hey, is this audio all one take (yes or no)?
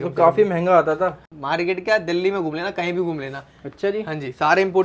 no